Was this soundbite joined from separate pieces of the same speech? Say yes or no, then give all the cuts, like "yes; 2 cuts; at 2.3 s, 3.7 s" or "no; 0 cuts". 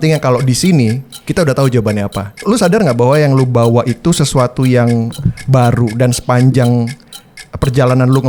yes; 1 cut; at 2.4 s